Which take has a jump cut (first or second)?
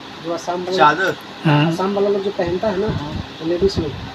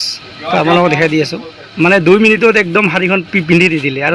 second